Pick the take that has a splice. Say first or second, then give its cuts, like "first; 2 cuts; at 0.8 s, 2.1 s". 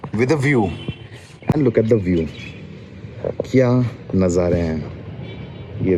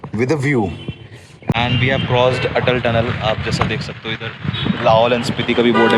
second; 1 cut; at 1.5 s